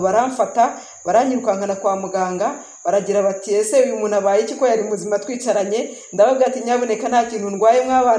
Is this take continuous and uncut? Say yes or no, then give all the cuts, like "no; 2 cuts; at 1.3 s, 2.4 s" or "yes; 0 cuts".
yes; 0 cuts